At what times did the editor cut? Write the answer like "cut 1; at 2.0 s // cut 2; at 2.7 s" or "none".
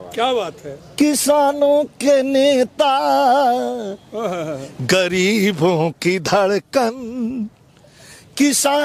none